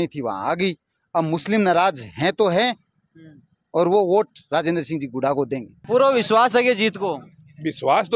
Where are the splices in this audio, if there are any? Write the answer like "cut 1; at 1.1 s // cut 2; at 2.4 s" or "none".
cut 1; at 5.7 s